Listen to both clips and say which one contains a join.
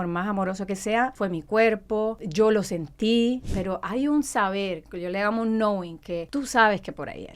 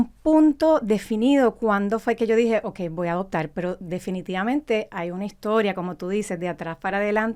first; 4 cuts; at 1.1 s, 2.2 s, 3.5 s, 6.2 s

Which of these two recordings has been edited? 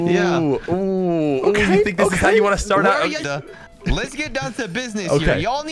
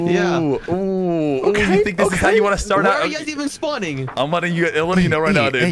first; 1 cut; at 3.2 s

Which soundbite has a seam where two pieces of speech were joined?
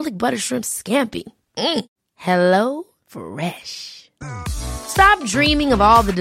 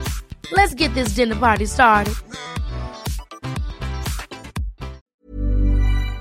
second; 1 cut; at 4.9 s

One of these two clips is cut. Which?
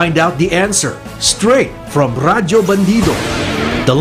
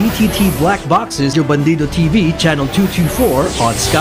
second; 1 cut; at 1.3 s

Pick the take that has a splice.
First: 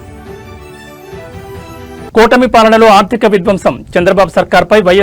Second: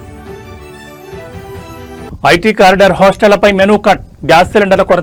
first; 1 cut; at 2.1 s

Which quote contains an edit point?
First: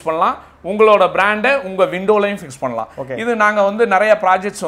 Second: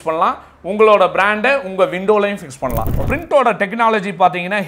second; 1 cut; at 3.1 s

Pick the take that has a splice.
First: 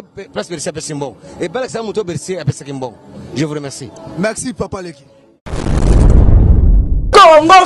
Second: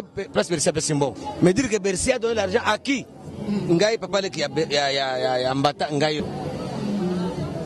second; 2 cuts; at 1.2 s, 6.2 s

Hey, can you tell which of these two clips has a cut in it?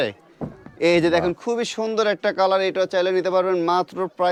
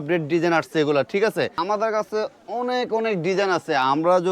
second; 1 cut; at 1.6 s

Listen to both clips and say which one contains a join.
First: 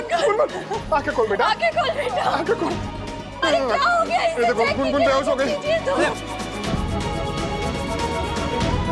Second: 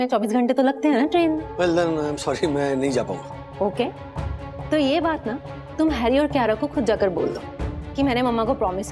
second; 1 cut; at 1.5 s

